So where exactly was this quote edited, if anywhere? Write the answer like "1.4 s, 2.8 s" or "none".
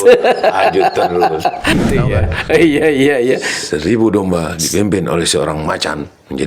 1.7 s